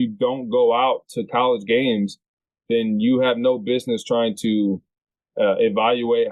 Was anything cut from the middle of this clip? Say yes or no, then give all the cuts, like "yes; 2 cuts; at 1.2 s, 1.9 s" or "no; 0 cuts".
no; 0 cuts